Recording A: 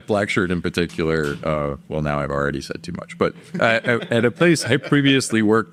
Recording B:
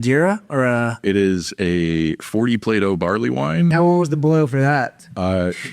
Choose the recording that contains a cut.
B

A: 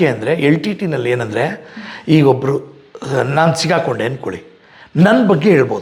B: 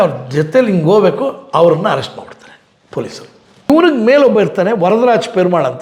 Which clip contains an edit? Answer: B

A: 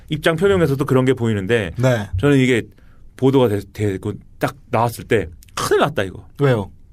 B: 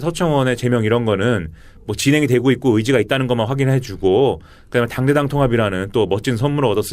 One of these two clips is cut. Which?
B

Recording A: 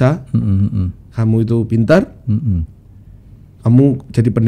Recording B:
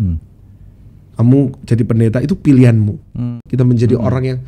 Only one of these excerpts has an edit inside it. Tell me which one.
B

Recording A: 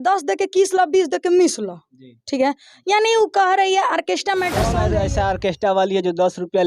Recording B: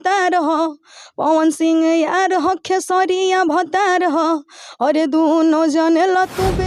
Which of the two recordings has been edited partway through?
A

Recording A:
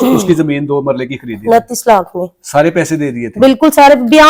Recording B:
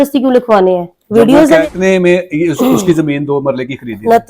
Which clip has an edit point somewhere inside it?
B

